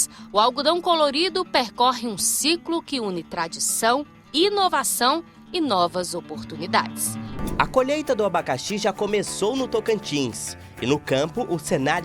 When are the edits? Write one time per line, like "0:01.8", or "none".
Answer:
0:07.4